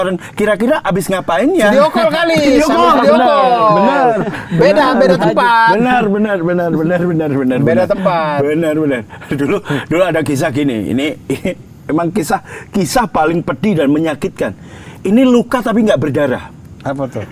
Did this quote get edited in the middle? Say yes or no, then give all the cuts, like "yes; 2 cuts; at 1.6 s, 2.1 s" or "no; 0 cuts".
no; 0 cuts